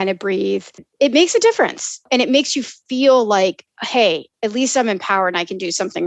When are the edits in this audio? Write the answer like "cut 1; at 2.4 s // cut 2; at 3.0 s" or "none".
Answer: cut 1; at 0.9 s // cut 2; at 2.0 s